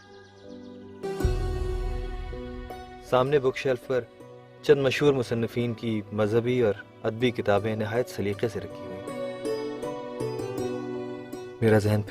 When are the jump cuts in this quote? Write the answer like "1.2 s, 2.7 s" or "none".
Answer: 1.0 s